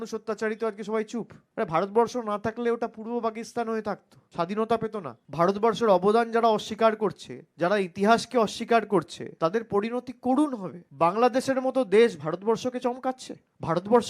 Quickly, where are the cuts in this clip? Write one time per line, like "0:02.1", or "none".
0:10.9

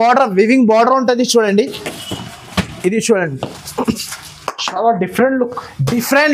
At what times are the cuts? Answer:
none

